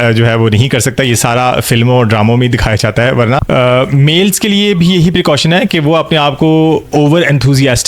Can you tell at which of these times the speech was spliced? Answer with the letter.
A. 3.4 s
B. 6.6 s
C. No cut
A